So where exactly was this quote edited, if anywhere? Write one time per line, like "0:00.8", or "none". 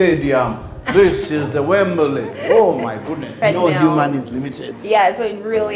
0:03.3

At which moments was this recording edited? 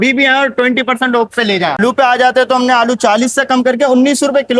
0:01.8

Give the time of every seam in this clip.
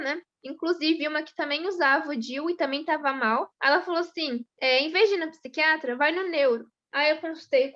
0:03.5
0:04.5
0:06.8

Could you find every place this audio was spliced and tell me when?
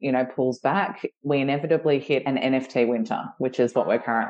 0:01.1
0:02.2

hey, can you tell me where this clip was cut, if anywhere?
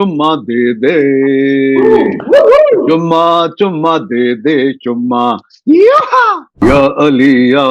0:06.5

